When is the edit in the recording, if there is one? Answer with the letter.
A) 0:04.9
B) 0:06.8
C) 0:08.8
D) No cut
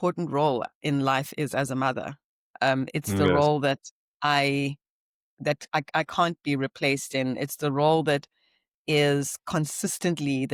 D